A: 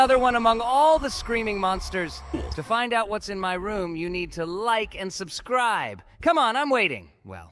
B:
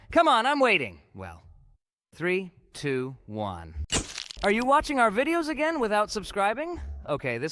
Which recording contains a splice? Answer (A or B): A